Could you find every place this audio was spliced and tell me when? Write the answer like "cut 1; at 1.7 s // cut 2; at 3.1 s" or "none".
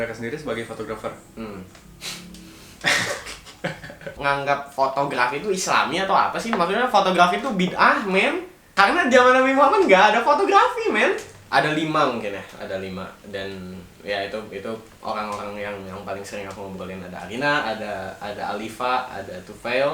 cut 1; at 4.1 s // cut 2; at 8.6 s // cut 3; at 11.3 s